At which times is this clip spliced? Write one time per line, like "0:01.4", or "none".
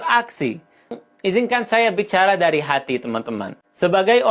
0:00.9